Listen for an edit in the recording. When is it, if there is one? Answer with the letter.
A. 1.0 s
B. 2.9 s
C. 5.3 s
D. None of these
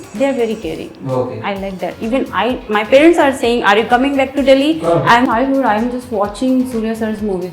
C